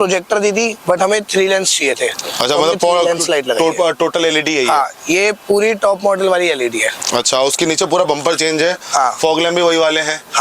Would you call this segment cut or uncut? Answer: uncut